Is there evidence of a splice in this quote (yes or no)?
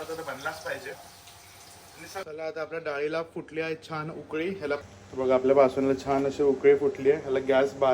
yes